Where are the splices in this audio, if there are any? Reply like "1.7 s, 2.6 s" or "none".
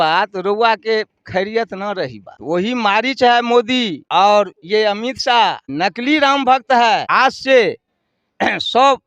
2.3 s, 4.0 s, 5.7 s, 7.1 s